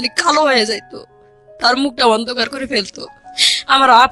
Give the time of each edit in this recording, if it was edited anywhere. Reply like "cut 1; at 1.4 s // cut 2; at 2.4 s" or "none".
none